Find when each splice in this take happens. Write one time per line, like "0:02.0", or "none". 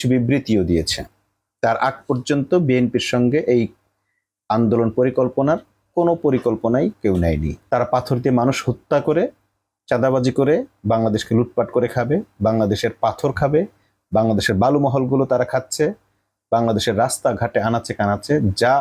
0:07.6